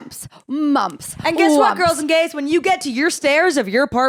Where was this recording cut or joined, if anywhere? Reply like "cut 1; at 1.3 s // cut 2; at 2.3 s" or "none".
none